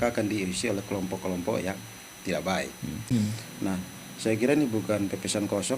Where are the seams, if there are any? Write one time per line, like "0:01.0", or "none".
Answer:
0:03.0